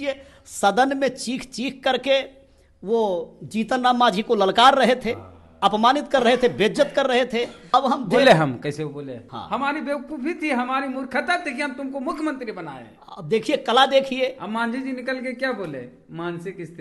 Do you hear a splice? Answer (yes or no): yes